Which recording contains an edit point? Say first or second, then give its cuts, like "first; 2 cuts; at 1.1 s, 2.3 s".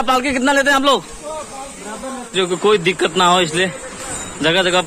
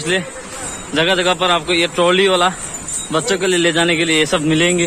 first; 1 cut; at 2.2 s